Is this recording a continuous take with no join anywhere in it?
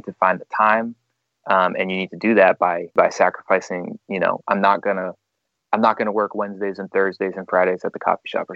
no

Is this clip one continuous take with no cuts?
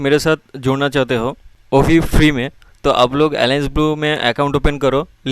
yes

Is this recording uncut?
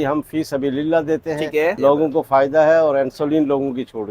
no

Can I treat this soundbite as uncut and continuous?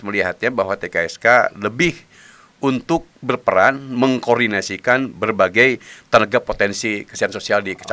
yes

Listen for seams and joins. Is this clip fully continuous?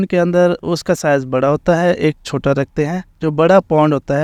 yes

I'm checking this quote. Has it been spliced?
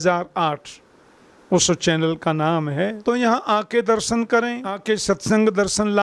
yes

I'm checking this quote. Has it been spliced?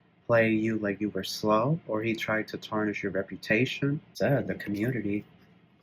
yes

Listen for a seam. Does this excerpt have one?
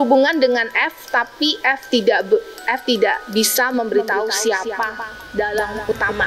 no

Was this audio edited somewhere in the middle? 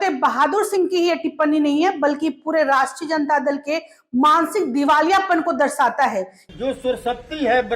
yes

